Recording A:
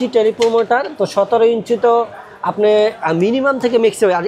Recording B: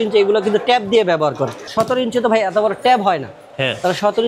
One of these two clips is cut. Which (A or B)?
B